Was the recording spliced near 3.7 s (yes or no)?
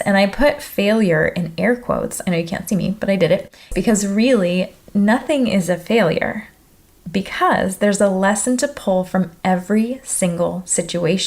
yes